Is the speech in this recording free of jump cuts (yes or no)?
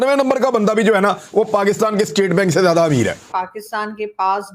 no